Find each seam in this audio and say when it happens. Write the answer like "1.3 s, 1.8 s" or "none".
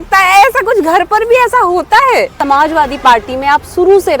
2.4 s